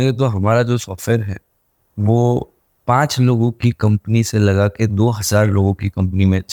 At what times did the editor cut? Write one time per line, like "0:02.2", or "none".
none